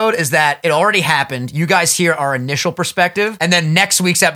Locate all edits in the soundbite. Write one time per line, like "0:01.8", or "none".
0:03.3